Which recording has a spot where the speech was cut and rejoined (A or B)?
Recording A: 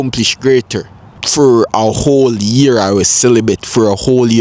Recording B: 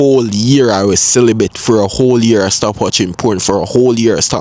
A